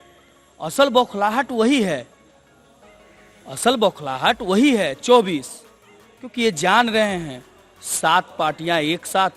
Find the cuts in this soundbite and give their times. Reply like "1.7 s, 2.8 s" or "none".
none